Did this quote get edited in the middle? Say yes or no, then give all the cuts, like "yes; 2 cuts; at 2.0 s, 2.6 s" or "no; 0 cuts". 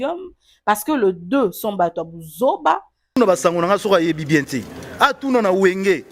yes; 1 cut; at 2.9 s